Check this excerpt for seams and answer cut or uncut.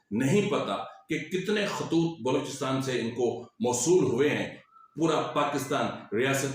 cut